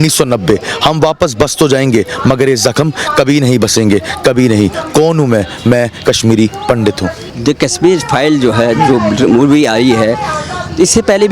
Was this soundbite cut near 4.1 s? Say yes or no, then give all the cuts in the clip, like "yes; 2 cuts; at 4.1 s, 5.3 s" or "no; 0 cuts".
no; 0 cuts